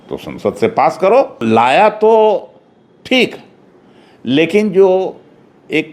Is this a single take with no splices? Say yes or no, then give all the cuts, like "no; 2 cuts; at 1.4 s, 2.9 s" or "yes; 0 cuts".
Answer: no; 1 cut; at 1.4 s